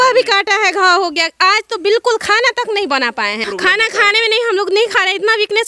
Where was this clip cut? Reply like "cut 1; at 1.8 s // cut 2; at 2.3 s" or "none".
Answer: cut 1; at 3.4 s